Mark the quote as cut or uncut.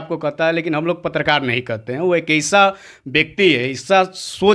uncut